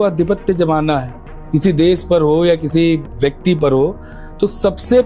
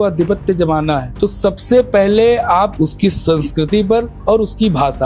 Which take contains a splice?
second; 3 cuts; at 1.1 s, 2.7 s, 4.1 s

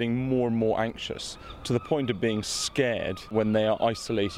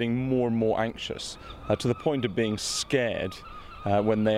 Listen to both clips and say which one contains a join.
first; 2 cuts; at 1.6 s, 3.3 s

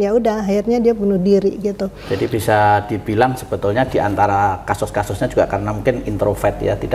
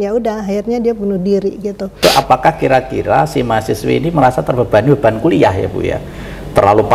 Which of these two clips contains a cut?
second; 1 cut; at 2.0 s

